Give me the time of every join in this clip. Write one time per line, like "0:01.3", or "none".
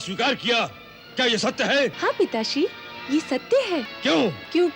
0:01.9
0:03.9

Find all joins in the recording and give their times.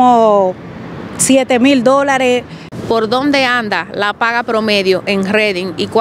0:02.6

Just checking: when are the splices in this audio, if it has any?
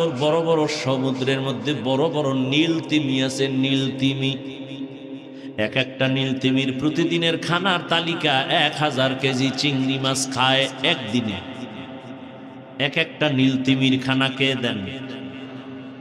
none

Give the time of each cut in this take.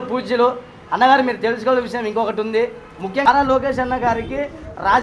0:03.3

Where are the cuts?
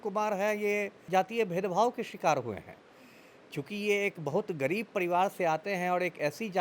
0:01.0

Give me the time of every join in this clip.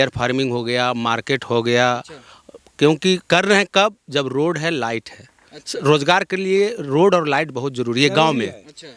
none

